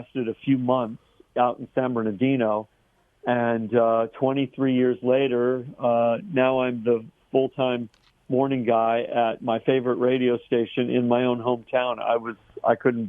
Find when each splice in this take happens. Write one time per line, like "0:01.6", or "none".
none